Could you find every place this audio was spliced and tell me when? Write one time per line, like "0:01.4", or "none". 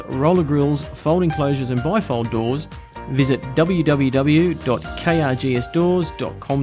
none